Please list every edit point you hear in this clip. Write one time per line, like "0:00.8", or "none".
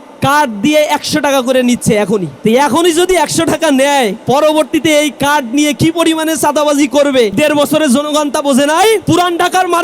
0:02.3
0:04.2
0:07.4
0:09.0